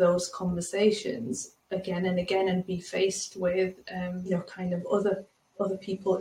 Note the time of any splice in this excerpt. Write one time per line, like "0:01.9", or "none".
0:04.3